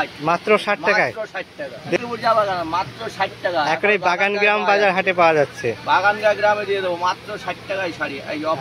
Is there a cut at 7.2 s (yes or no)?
no